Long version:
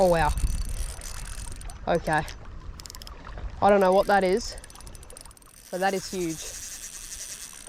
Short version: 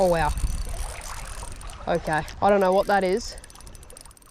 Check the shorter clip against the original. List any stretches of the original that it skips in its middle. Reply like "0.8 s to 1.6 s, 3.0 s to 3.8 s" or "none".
2.3 s to 3.5 s